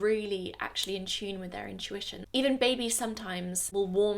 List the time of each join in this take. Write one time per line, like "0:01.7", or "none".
0:02.2